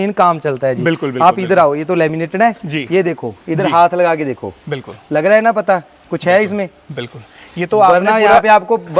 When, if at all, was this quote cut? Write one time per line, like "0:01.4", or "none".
none

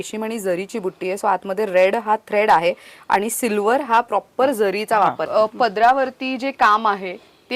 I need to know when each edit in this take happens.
0:05.2

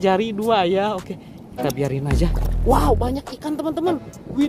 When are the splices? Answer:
0:02.3

